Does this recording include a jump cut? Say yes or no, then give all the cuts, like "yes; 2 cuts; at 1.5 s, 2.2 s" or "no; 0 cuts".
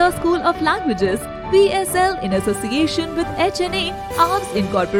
no; 0 cuts